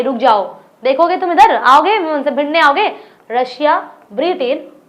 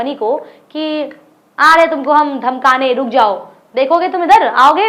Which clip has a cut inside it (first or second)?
first